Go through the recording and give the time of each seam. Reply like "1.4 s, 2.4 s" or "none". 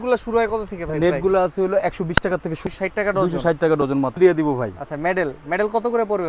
2.7 s, 4.2 s